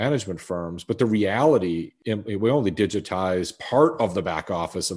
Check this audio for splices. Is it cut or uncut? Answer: cut